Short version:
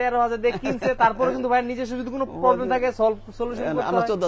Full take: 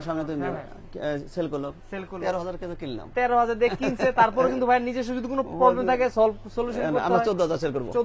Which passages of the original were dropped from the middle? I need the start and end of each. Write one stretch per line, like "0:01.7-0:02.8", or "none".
none